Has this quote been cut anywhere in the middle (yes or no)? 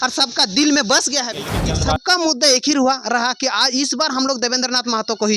yes